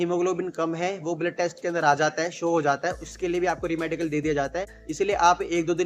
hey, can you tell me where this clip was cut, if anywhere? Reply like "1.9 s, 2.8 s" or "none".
none